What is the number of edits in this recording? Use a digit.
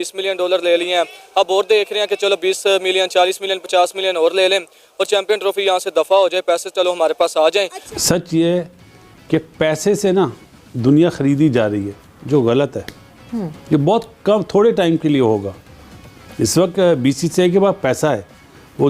1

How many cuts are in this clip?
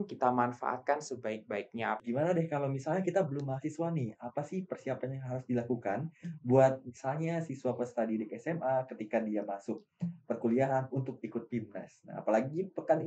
1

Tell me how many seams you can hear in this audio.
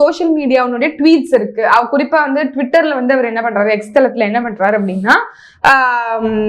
0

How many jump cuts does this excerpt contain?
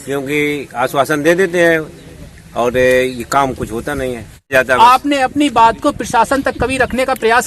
1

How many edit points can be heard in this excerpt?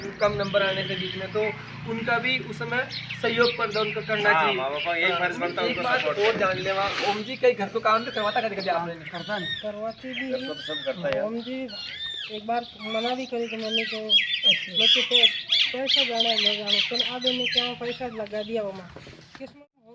0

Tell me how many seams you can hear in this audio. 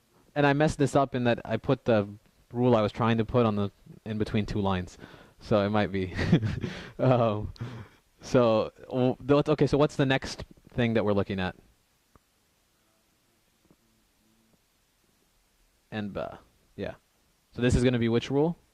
0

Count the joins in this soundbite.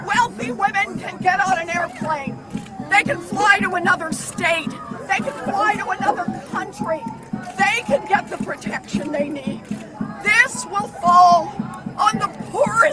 0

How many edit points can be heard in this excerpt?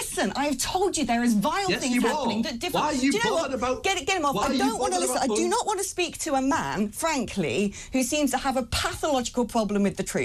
0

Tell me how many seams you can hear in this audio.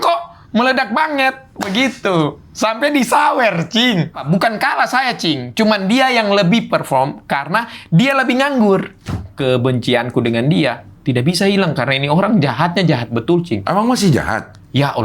2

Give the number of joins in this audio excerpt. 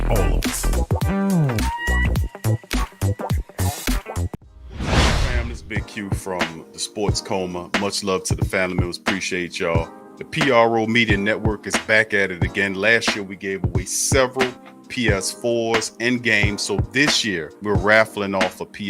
2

